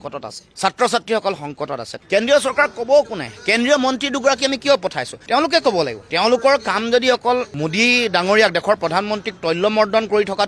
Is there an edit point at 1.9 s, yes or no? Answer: yes